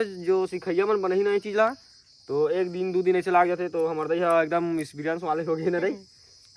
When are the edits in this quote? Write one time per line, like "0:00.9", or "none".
none